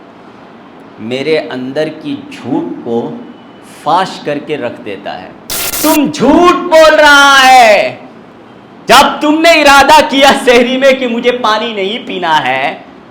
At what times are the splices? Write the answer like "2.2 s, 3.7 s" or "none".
5.7 s